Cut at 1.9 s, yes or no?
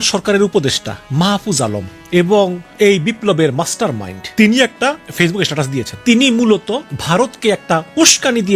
yes